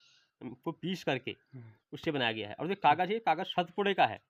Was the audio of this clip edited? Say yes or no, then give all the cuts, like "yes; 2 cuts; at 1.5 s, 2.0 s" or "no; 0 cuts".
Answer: no; 0 cuts